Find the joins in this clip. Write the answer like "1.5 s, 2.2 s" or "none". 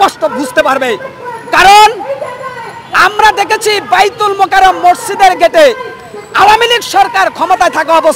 none